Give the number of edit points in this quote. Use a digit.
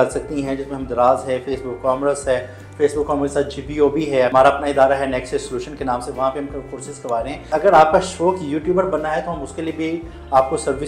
2